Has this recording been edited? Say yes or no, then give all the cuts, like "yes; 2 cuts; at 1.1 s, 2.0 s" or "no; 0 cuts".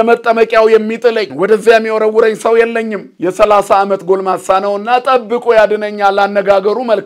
yes; 2 cuts; at 1.3 s, 3.0 s